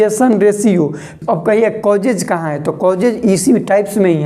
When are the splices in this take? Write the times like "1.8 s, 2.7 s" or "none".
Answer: 1.1 s

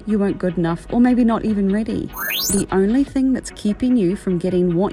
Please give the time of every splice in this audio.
2.4 s

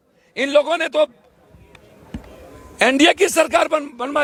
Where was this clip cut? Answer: none

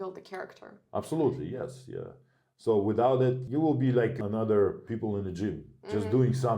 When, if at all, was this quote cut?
3.4 s, 4.2 s, 4.8 s

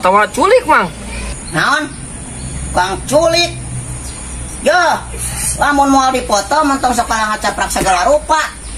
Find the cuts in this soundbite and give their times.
1.3 s

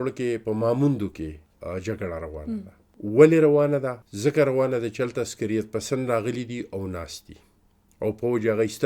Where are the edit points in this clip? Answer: 1.5 s, 2.8 s, 4.0 s

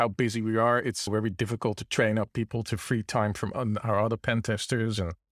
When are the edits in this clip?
1.1 s

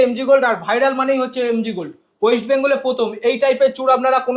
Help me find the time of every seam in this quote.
none

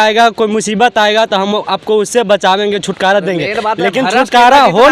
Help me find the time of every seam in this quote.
none

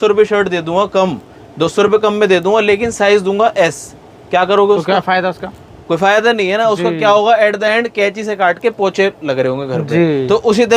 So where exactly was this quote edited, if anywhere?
none

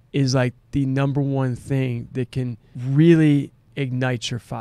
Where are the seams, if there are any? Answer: 2.7 s, 3.7 s

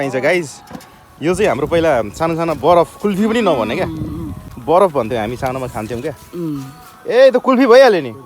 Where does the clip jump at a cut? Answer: none

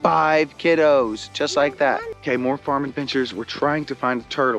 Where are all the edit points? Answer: none

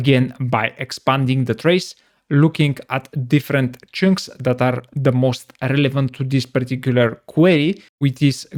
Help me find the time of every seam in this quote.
none

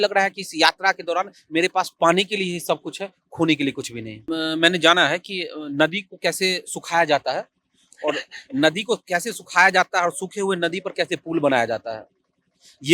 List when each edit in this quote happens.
4.2 s

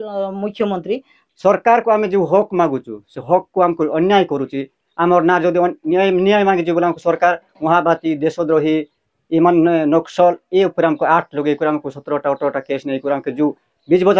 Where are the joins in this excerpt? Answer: 1.2 s

